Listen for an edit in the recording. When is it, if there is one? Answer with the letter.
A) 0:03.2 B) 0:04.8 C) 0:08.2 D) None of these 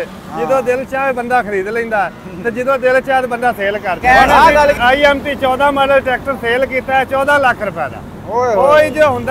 B